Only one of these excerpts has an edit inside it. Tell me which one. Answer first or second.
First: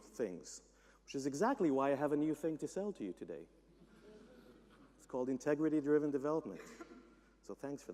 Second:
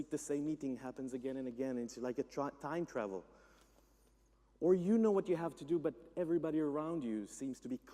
second